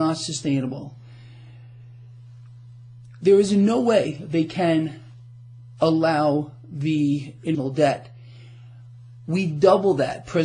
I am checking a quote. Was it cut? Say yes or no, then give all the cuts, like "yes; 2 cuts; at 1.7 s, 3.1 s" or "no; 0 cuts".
no; 0 cuts